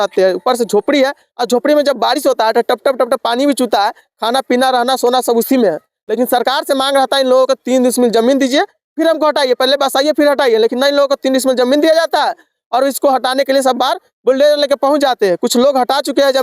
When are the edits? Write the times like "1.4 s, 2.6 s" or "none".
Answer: none